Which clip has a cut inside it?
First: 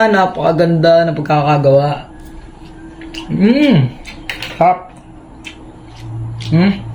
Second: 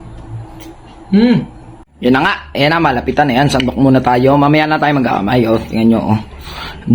second; 1 cut; at 1.9 s

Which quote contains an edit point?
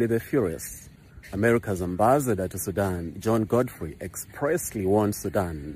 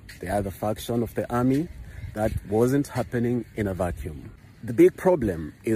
second; 1 cut; at 4.6 s

